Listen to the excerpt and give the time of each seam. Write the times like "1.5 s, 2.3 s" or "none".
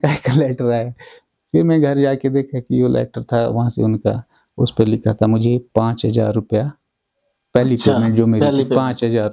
none